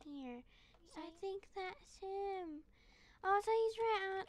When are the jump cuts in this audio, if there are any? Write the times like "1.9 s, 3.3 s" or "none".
1.0 s